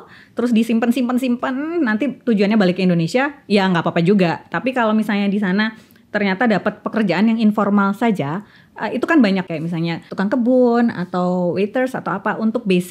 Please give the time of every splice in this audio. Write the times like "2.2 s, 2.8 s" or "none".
9.5 s